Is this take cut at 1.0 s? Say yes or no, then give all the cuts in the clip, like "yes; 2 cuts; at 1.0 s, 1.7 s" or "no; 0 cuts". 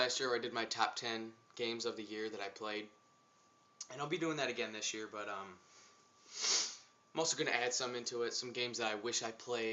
yes; 1 cut; at 1.0 s